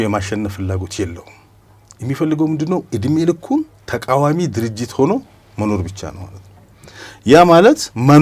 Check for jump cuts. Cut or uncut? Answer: uncut